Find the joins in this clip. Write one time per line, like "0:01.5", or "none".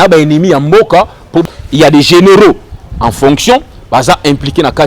0:01.4